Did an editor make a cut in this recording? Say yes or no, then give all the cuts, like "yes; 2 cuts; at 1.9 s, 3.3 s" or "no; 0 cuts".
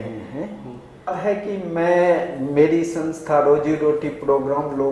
yes; 1 cut; at 1.1 s